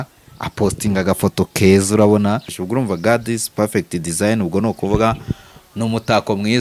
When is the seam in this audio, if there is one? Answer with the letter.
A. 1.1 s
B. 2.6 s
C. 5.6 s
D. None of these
B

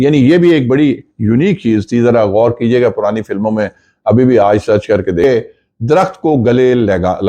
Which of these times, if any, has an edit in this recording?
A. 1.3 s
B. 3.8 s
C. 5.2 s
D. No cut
C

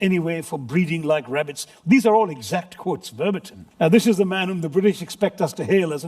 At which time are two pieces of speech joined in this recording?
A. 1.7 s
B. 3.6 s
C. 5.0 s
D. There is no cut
B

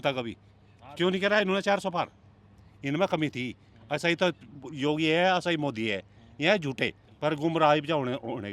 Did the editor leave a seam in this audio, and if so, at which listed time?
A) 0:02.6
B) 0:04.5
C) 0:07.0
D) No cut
C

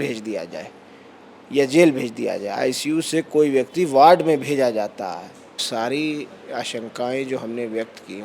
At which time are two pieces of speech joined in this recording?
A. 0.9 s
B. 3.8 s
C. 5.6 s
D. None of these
C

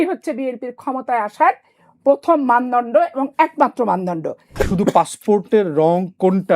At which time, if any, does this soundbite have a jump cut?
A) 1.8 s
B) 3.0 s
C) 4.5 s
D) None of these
C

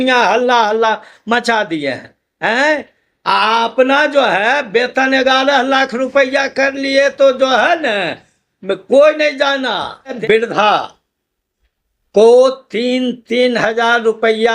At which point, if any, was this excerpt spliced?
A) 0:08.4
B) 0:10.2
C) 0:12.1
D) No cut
B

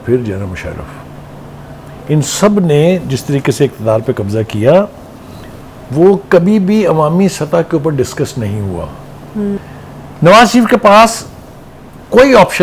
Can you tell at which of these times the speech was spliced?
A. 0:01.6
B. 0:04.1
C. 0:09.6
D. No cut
C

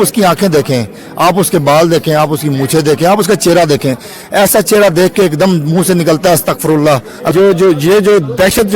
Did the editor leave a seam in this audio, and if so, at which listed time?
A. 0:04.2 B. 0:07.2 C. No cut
B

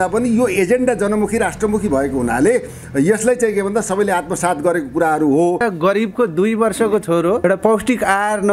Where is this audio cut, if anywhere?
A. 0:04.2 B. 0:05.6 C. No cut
B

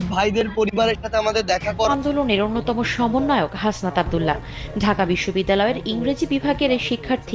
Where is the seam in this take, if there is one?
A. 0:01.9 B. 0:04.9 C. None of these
A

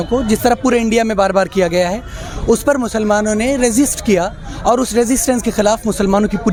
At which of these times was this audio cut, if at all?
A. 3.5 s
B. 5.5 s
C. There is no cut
C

